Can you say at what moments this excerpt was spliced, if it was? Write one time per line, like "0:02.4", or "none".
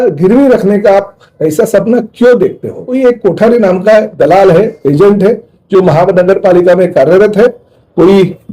0:02.8